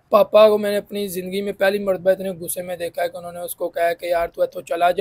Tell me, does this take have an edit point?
no; 0 cuts

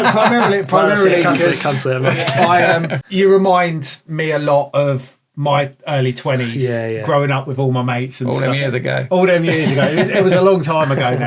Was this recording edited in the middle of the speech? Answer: yes; 1 cut; at 3.0 s

